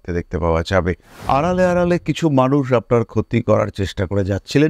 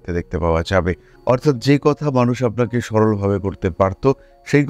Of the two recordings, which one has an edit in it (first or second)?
first